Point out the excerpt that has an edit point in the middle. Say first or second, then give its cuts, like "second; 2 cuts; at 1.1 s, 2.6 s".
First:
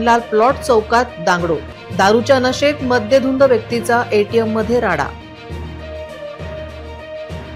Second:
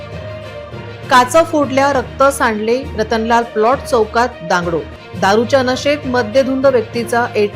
second; 1 cut; at 1.1 s